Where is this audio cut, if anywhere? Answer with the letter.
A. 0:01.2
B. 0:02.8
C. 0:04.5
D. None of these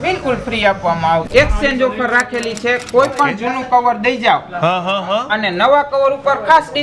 A